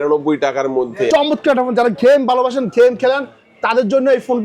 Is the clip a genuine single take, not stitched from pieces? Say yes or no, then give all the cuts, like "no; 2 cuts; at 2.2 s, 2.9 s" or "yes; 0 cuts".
no; 1 cut; at 1.1 s